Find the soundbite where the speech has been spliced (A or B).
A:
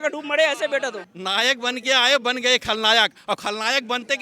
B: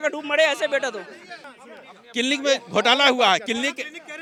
A